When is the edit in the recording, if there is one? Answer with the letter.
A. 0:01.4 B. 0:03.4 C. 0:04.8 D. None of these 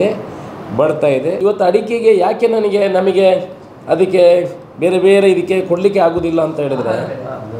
A